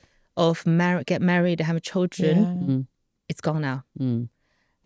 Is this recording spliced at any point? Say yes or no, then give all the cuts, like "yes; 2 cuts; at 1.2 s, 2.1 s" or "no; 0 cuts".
no; 0 cuts